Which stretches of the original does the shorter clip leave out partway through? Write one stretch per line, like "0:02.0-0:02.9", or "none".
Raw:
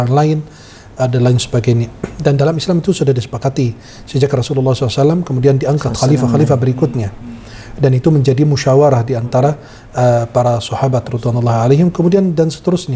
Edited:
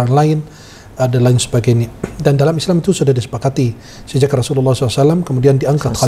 none